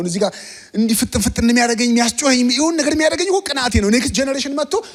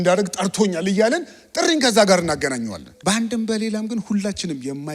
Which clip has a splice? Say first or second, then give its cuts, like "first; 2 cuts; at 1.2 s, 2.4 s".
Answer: second; 1 cut; at 2.8 s